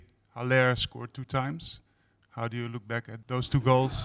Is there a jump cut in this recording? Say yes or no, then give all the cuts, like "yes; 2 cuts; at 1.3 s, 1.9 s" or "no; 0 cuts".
yes; 1 cut; at 3.1 s